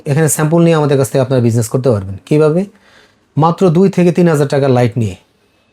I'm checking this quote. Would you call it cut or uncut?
uncut